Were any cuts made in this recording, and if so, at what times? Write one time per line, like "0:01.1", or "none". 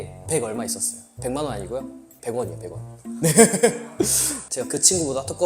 0:04.3